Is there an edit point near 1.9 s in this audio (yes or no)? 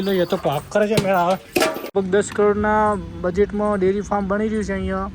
yes